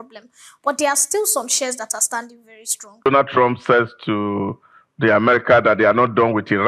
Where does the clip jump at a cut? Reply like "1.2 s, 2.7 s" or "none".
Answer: 3.1 s